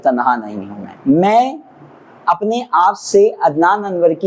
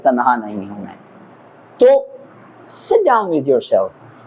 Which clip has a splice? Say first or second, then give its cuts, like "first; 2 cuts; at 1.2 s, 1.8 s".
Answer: first; 1 cut; at 0.9 s